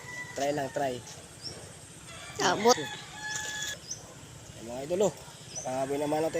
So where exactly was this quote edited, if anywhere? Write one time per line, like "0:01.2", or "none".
0:03.7